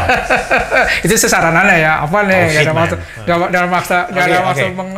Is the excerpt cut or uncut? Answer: uncut